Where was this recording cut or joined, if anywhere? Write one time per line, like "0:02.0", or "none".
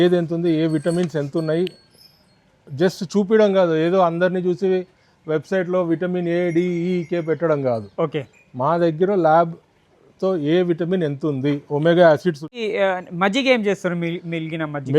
0:12.5